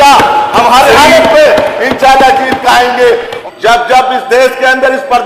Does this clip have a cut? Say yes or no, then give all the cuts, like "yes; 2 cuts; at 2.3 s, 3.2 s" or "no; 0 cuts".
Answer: yes; 1 cut; at 3.3 s